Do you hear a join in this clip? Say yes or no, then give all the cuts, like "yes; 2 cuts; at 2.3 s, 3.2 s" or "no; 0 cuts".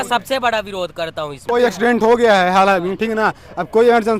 yes; 1 cut; at 1.5 s